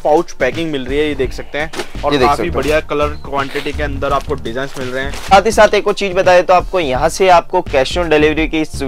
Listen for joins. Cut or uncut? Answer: cut